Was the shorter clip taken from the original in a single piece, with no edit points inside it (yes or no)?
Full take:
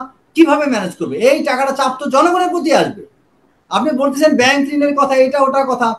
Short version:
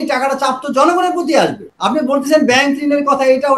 no